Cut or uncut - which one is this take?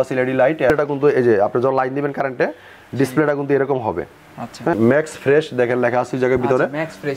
cut